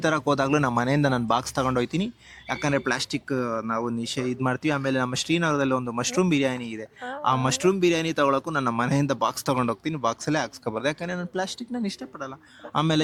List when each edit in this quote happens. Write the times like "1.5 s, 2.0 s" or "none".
none

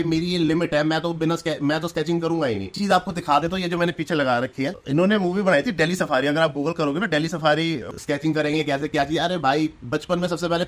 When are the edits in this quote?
2.8 s, 4.8 s, 7.9 s

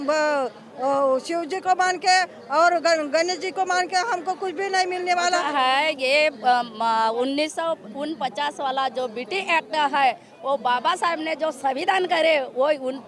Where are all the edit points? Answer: 5.5 s

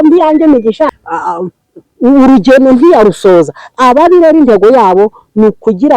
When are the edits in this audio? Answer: 1.0 s

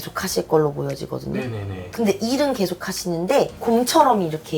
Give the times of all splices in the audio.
3.6 s

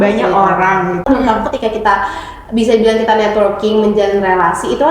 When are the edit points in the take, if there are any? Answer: 1.0 s

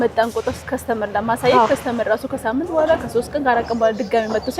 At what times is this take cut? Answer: none

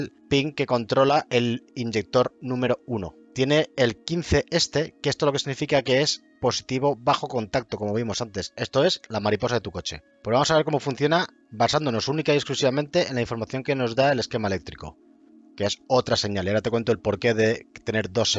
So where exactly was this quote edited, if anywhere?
3.2 s, 8.5 s, 15.3 s

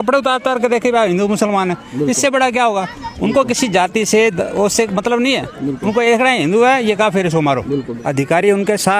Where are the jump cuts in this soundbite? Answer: 7.9 s

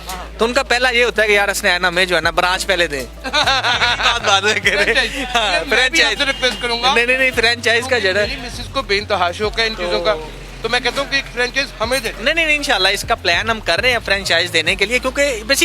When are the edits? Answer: none

